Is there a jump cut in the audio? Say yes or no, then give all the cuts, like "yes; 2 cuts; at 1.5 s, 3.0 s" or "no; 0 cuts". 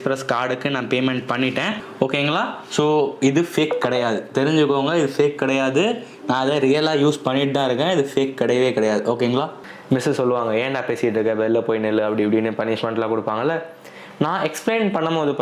yes; 2 cuts; at 1.8 s, 9.5 s